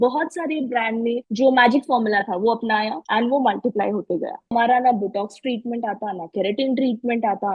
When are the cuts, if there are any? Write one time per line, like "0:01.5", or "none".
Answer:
0:01.3
0:03.0
0:04.5